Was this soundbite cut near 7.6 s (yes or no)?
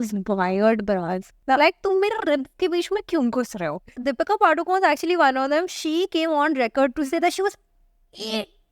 no